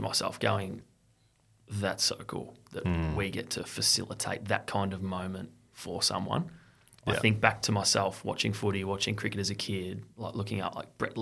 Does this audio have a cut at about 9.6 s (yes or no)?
no